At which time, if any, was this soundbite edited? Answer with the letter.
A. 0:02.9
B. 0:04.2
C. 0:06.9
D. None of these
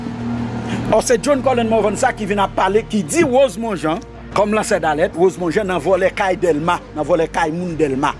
B